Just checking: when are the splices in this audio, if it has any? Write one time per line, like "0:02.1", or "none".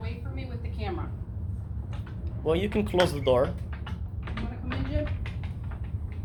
none